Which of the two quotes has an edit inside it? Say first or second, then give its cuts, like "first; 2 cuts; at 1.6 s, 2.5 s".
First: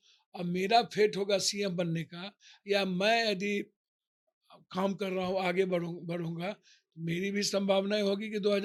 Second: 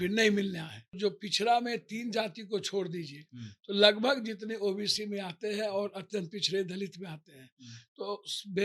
second; 1 cut; at 1.0 s